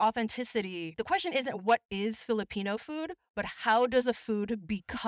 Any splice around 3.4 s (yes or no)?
no